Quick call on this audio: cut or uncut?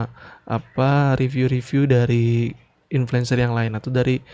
uncut